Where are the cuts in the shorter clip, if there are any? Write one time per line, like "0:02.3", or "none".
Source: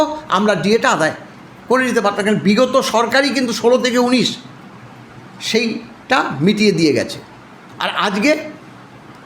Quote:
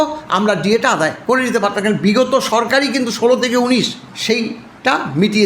0:01.2
0:04.0